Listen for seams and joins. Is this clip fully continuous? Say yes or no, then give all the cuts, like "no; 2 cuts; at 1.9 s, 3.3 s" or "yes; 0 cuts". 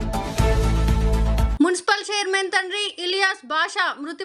no; 1 cut; at 1.5 s